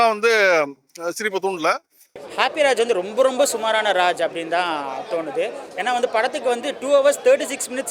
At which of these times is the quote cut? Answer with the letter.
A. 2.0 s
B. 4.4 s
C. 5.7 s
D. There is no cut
D